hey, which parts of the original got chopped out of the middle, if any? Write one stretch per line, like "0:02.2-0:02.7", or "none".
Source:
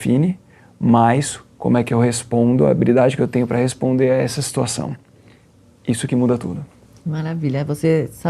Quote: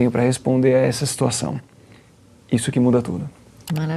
none